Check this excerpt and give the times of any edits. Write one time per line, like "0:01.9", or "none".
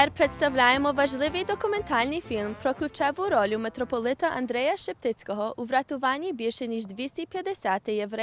none

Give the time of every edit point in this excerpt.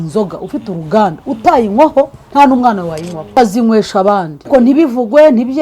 0:03.3
0:04.5

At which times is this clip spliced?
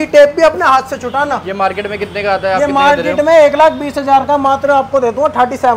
none

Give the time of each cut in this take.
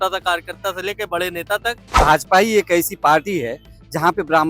0:01.9

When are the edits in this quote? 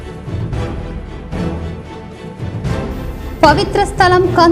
0:00.9

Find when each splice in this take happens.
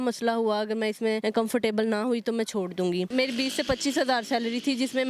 0:01.2
0:03.1

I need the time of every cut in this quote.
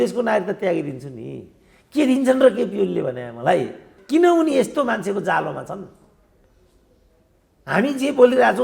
0:03.9

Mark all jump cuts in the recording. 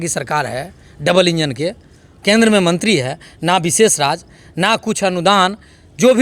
none

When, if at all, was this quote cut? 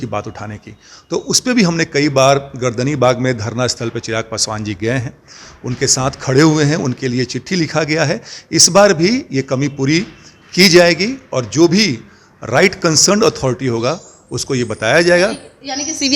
none

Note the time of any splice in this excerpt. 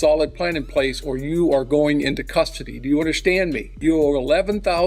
0:03.7

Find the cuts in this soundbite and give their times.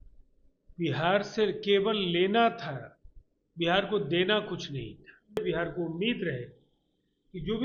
0:05.4

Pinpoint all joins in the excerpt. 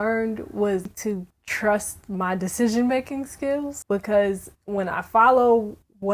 0:00.9
0:03.8

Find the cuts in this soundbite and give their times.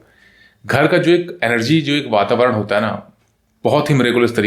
none

